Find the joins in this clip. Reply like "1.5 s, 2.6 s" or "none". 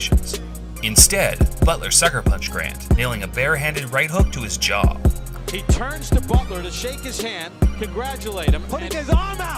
none